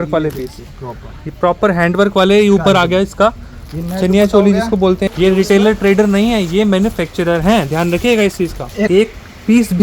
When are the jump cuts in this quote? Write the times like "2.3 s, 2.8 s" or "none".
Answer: 5.0 s, 8.9 s